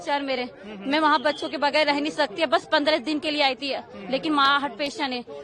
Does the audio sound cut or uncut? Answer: uncut